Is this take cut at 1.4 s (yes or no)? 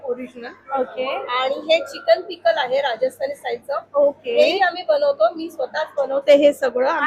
no